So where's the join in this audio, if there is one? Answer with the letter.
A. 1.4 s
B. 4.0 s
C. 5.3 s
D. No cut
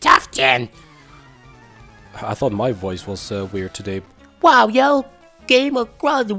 B